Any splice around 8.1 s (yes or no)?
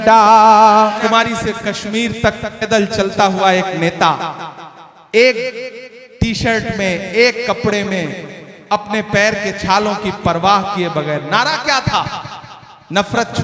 no